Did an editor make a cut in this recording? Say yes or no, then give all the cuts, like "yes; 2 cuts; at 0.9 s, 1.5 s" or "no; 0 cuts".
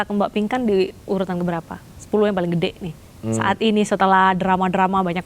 no; 0 cuts